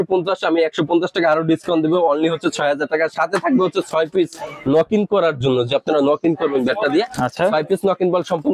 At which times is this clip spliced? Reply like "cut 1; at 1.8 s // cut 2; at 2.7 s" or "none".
none